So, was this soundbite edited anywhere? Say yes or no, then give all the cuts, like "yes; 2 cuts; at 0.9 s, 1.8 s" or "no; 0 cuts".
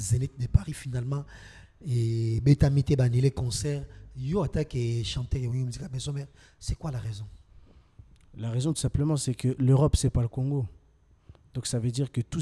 no; 0 cuts